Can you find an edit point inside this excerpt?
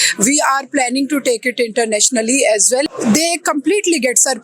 yes; 1 cut; at 2.9 s

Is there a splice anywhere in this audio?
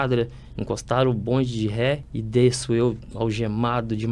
yes; 1 cut; at 2.1 s

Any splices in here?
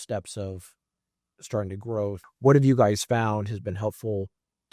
yes; 1 cut; at 2.3 s

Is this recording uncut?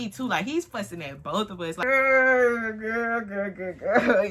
no; 1 cut; at 1.8 s

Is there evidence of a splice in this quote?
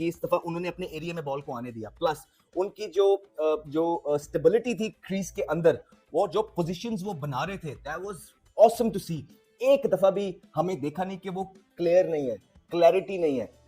no; 0 cuts

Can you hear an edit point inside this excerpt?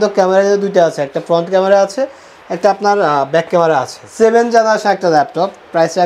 yes; 1 cut; at 4.0 s

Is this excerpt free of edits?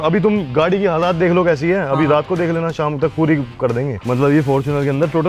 no; 1 cut; at 4.0 s

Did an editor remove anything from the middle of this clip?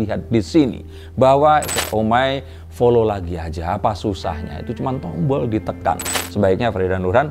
yes; 2 cuts; at 1.8 s, 6.1 s

